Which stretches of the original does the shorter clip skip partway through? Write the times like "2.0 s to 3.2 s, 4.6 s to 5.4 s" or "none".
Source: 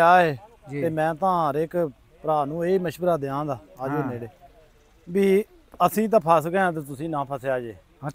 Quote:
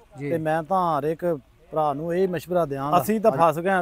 3.4 s to 5.7 s